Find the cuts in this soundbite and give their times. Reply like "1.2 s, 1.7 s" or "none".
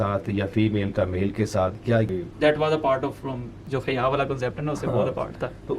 2.1 s, 3.5 s